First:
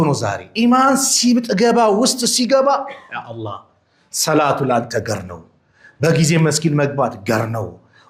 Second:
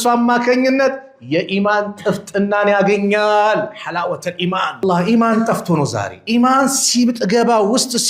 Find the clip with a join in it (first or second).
second